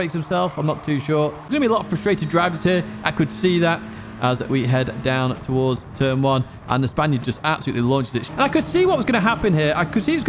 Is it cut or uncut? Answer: cut